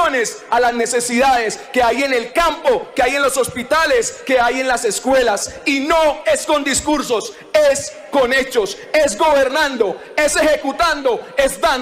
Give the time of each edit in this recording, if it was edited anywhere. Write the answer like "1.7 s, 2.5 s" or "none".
none

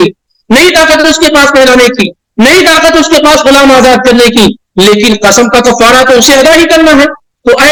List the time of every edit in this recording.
none

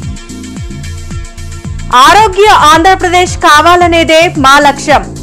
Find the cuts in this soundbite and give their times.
1.0 s

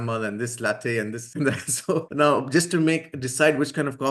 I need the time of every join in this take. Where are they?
1.2 s, 2.1 s

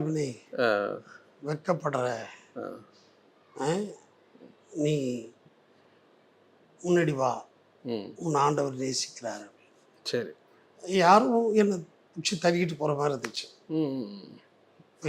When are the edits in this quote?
none

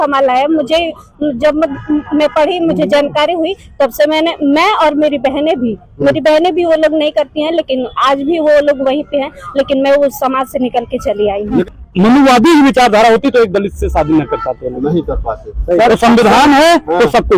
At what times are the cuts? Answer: 11.6 s

